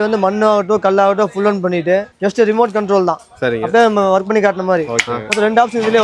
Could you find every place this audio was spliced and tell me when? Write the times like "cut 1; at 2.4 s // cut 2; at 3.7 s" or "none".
none